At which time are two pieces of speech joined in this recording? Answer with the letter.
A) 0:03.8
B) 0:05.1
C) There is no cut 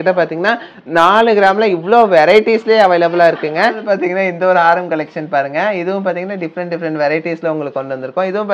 A